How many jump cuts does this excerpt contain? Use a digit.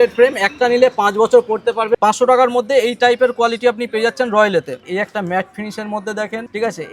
2